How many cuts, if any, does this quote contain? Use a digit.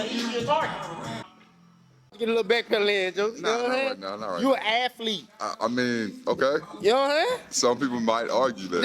1